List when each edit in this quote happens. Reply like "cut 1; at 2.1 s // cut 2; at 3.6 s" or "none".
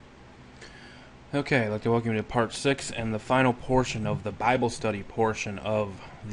none